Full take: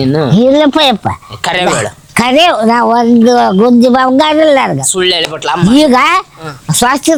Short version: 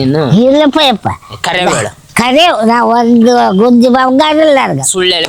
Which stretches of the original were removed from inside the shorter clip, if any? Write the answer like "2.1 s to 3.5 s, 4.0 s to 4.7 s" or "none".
none